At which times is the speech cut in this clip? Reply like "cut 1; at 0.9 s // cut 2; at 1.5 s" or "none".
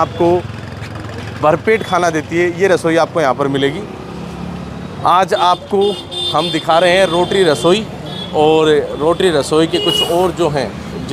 none